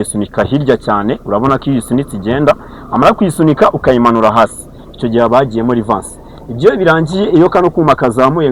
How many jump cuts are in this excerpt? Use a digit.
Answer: 0